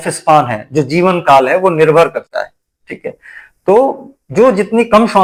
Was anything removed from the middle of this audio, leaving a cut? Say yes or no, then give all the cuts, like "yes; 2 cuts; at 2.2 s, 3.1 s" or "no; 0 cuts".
no; 0 cuts